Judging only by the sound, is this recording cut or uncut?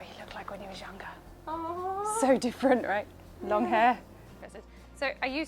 uncut